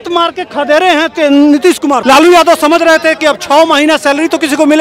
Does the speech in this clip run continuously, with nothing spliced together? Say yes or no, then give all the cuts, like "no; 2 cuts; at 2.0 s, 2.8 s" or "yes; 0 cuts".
no; 1 cut; at 2.0 s